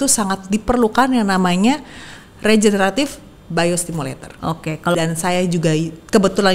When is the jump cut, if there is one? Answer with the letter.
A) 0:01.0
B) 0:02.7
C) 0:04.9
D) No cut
C